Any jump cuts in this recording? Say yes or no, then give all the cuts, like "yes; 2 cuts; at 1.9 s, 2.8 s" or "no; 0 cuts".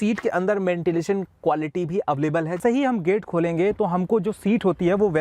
yes; 1 cut; at 2.6 s